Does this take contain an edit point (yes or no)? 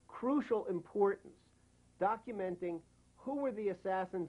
no